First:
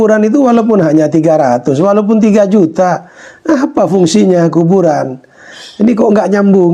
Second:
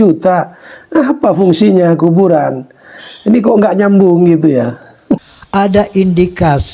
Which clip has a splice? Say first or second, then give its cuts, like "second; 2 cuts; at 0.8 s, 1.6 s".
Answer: second; 1 cut; at 5.3 s